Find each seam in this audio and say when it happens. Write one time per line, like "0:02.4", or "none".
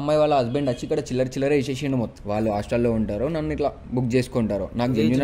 0:02.1